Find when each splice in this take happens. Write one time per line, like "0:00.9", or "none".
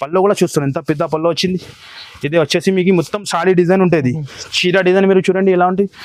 none